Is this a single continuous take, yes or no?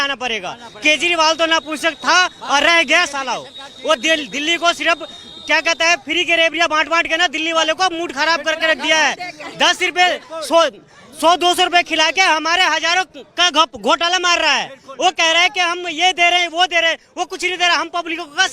yes